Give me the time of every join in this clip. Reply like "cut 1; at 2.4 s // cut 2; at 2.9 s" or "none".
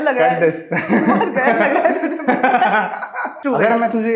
cut 1; at 3.2 s